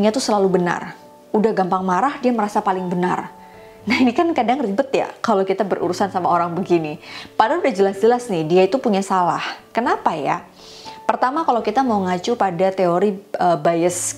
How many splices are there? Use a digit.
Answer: 0